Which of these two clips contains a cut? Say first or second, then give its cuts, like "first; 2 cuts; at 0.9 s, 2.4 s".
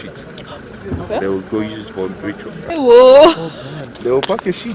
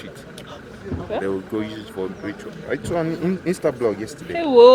first; 1 cut; at 2.6 s